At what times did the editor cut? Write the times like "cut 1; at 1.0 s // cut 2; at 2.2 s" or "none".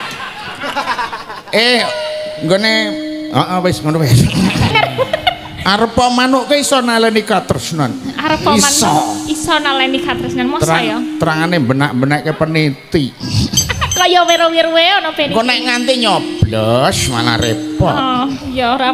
cut 1; at 4.7 s